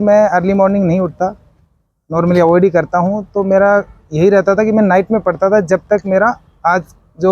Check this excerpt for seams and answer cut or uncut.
uncut